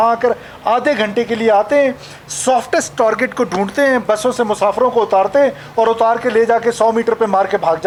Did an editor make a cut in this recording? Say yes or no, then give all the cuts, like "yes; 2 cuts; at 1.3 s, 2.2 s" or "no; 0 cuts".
no; 0 cuts